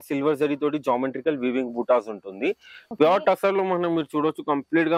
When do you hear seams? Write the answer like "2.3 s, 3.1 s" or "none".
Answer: 2.8 s